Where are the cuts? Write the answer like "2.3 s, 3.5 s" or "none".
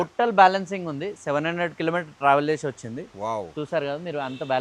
none

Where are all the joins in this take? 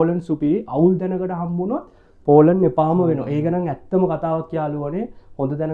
none

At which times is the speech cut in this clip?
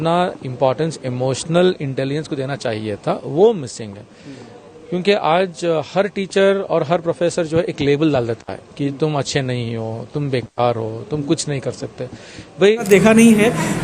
12.9 s

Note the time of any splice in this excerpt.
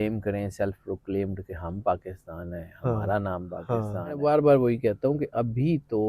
4.1 s

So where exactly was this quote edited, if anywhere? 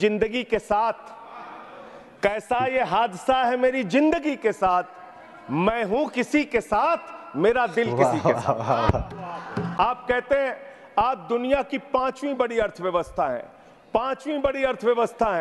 9.7 s

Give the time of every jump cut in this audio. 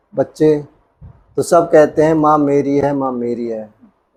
none

